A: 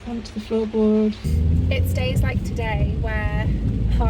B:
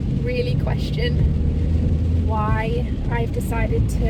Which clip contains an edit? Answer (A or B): A